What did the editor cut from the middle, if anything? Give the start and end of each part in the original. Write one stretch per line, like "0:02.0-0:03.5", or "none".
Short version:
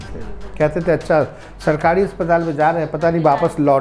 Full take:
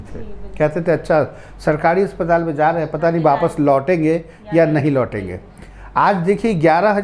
none